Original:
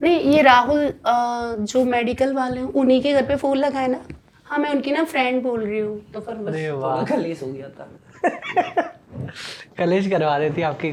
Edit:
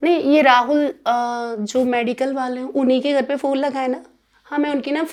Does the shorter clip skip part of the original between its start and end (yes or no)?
no